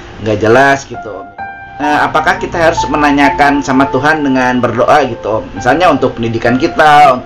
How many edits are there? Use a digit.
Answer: 1